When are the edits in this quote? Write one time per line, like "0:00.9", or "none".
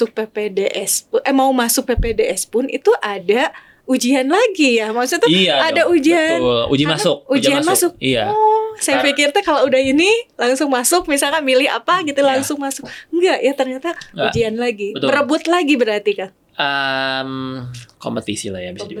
none